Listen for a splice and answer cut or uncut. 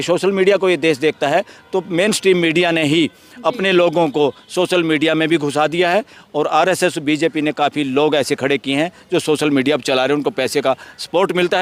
uncut